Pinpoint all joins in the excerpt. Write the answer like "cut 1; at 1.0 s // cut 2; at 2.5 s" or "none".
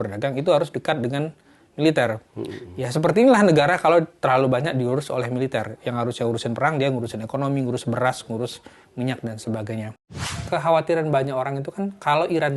cut 1; at 10.3 s